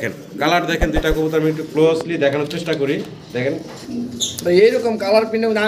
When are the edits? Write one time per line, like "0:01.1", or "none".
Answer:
0:03.8

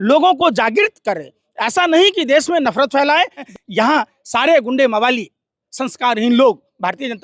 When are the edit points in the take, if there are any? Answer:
0:03.5

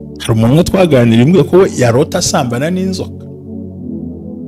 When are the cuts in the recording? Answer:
0:03.5

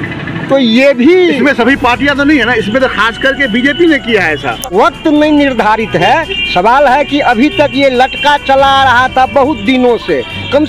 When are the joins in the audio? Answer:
0:04.7

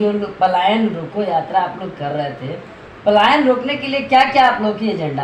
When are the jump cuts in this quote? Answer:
none

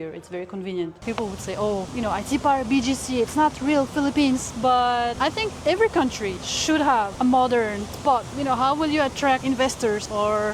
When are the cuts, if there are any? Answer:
0:01.0
0:01.9
0:04.8
0:06.5
0:07.1
0:08.3
0:09.7

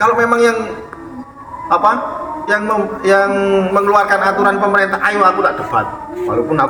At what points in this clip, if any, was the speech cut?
none

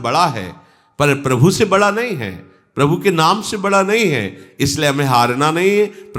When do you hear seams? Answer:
none

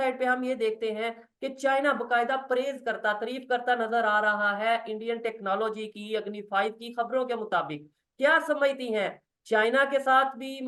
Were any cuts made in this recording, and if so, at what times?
none

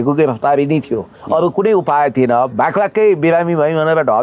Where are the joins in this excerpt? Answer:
none

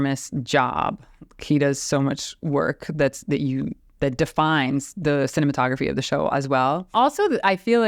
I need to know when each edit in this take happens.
0:06.9

